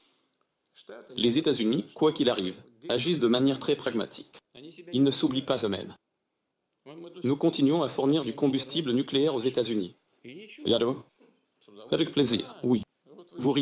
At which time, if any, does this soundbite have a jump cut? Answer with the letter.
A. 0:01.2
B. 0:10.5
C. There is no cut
A